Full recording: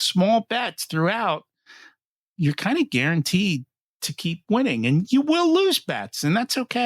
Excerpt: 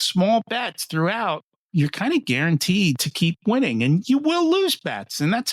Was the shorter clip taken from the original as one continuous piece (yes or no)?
no